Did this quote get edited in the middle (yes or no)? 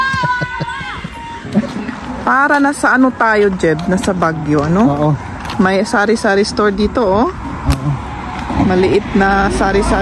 yes